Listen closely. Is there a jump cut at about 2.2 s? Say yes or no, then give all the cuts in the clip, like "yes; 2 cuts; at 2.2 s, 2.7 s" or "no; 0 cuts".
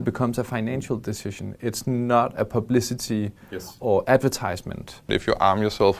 no; 1 cut; at 5.1 s